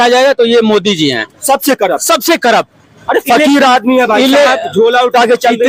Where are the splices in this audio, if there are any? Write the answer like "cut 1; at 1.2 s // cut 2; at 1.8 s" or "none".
none